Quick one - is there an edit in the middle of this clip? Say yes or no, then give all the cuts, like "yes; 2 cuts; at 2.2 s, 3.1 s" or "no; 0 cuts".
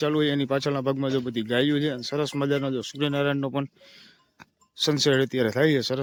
no; 0 cuts